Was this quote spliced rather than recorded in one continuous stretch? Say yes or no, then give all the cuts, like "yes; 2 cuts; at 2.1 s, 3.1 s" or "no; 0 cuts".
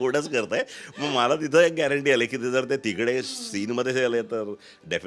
no; 0 cuts